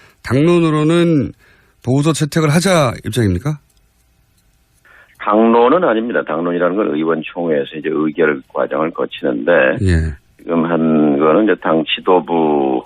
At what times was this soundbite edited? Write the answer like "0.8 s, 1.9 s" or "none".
5.7 s